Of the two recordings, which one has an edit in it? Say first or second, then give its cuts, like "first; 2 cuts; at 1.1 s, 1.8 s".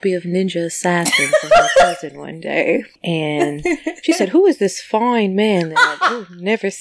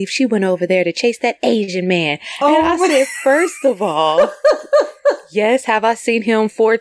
first; 1 cut; at 2.9 s